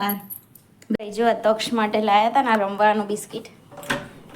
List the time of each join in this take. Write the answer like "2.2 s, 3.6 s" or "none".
0.9 s